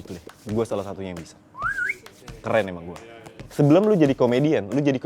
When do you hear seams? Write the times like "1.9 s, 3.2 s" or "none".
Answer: 3.4 s

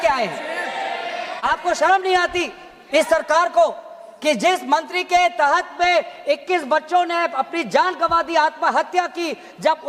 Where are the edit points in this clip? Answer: 1.4 s

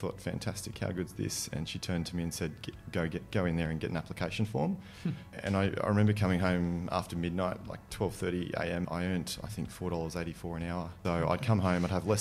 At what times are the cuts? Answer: 5.4 s, 8.8 s, 10.9 s

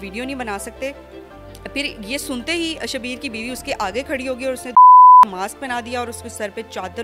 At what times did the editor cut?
none

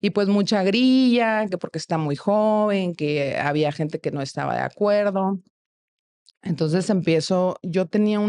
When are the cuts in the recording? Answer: none

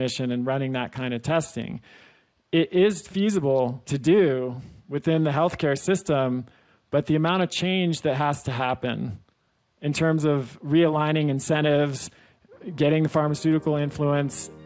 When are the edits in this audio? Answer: 3.9 s

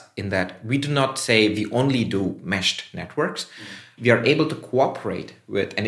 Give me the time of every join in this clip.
4.0 s

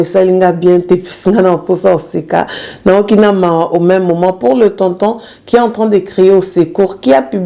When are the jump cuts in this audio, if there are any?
none

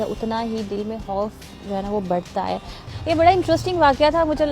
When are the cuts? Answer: 2.9 s

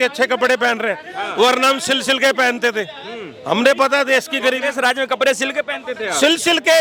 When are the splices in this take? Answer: none

